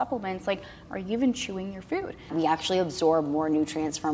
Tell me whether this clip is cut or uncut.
cut